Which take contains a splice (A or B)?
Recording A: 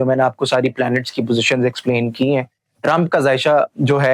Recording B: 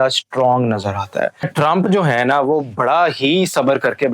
B